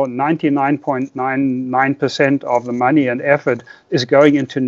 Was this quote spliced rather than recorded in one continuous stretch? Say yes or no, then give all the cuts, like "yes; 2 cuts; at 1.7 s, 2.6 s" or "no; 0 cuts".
no; 0 cuts